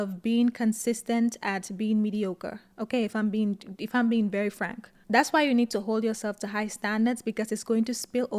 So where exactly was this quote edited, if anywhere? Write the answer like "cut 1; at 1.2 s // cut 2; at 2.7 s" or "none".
none